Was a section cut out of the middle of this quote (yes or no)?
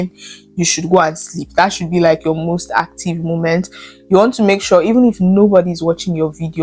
no